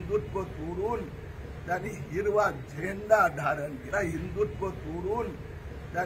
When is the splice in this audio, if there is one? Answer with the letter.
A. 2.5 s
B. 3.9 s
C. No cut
B